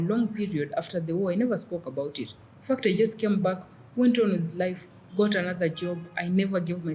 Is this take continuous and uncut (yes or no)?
yes